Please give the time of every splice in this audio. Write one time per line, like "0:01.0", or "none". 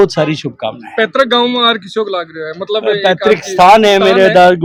none